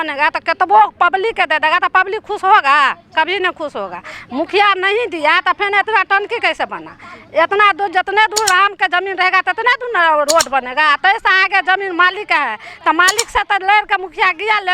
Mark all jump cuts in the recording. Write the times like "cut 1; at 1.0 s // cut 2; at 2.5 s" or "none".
none